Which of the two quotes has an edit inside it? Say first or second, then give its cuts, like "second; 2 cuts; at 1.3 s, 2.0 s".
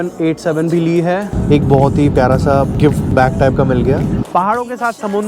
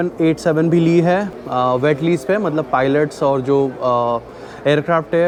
first; 3 cuts; at 1.3 s, 2.8 s, 4.2 s